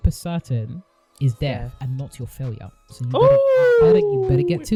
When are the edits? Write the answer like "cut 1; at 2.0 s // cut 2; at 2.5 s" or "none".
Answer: none